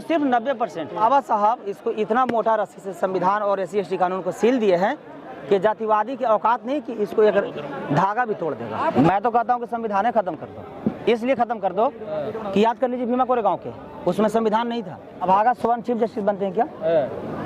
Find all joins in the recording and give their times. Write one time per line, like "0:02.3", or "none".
0:01.0
0:09.0
0:15.3